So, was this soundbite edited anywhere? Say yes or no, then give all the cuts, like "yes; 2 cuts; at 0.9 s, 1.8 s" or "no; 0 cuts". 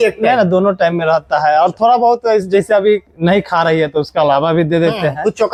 no; 0 cuts